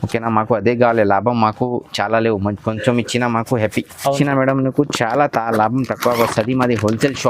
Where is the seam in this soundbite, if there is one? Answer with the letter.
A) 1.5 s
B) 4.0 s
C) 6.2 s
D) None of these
B